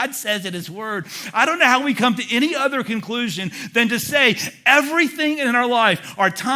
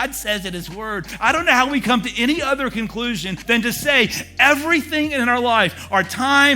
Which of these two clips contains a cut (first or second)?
second